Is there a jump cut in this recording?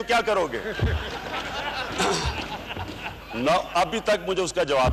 no; 0 cuts

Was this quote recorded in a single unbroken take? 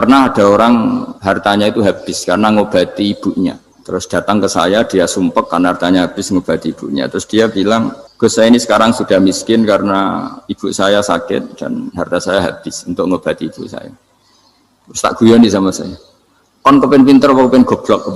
no; 3 cuts; at 1.1 s, 3.7 s, 8.0 s

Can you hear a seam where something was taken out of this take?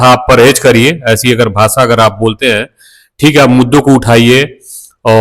no; 0 cuts

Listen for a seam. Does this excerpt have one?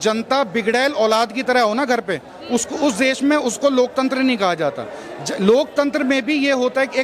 no; 0 cuts

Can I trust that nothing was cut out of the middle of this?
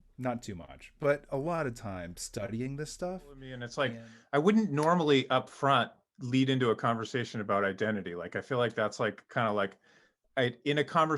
no; 1 cut; at 3.6 s

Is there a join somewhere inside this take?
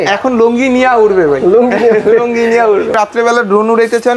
yes; 1 cut; at 2.9 s

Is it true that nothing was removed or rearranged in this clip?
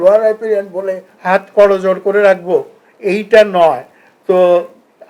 no; 1 cut; at 1.1 s

